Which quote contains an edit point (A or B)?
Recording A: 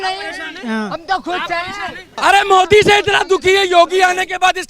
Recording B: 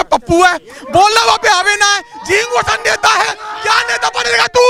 A